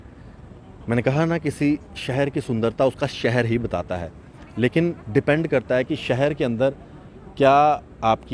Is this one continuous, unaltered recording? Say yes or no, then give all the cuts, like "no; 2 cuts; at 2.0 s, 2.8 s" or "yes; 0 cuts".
yes; 0 cuts